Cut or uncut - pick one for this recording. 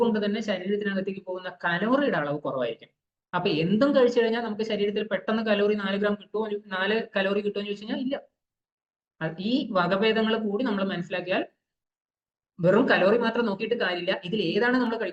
uncut